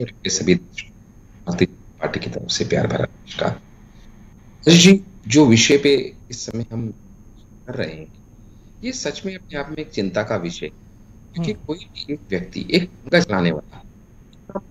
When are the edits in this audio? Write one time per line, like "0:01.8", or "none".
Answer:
none

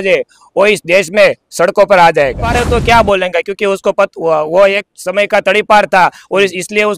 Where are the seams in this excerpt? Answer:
0:02.6

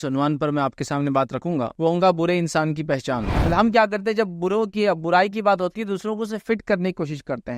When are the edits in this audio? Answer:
0:01.7
0:03.3

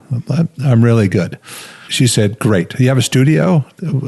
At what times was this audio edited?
0:01.9

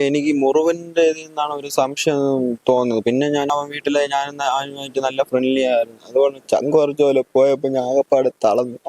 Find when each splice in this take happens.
0:03.5

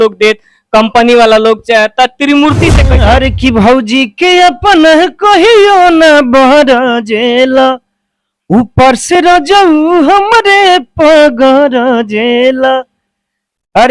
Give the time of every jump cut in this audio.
0:02.8

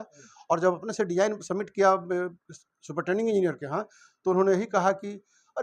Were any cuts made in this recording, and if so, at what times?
none

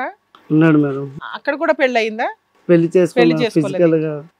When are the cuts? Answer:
0:01.3

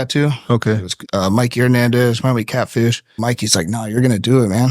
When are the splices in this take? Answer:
0:00.9
0:03.2

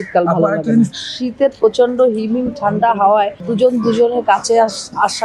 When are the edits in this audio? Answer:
0:00.9
0:03.5

